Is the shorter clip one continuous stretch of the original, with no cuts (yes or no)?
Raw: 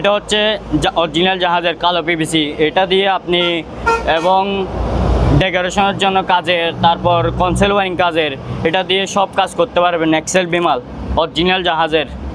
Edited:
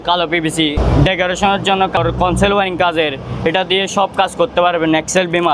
no